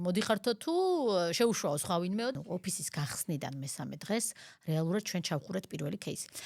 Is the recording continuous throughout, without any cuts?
no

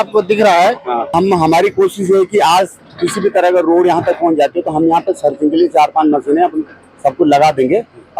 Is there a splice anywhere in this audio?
yes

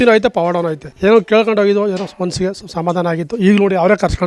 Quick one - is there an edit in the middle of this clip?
yes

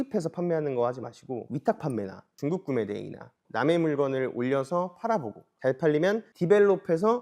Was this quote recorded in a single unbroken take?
no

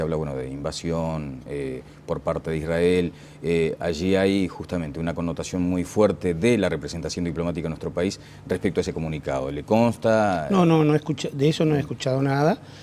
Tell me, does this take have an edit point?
yes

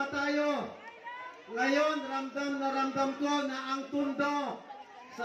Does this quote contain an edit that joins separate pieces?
no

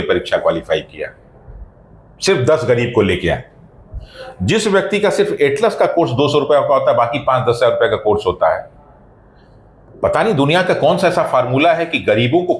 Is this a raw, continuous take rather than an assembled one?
yes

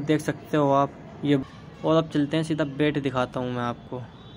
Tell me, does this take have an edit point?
yes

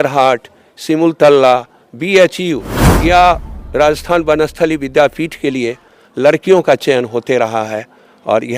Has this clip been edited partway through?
no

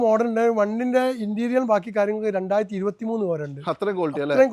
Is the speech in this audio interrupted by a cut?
no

